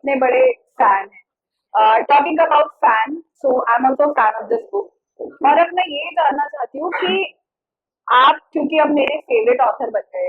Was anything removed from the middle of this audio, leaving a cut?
no; 0 cuts

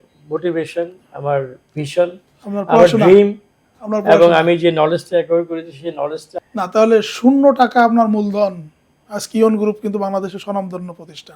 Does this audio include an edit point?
yes; 1 cut; at 6.3 s

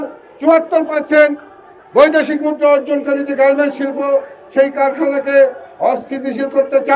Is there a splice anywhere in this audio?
no; 0 cuts

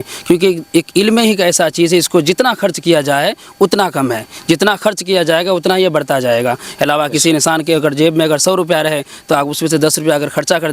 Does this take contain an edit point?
no; 0 cuts

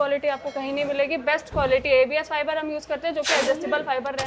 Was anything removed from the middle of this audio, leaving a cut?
no; 0 cuts

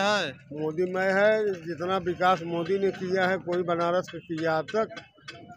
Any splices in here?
no; 0 cuts

